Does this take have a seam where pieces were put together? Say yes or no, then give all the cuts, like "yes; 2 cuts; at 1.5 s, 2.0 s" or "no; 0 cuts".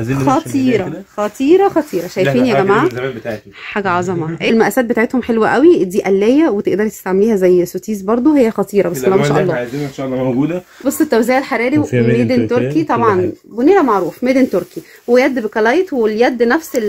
yes; 2 cuts; at 4.5 s, 10.7 s